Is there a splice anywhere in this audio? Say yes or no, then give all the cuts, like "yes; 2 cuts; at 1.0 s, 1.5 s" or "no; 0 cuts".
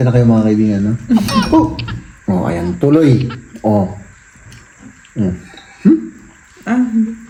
no; 0 cuts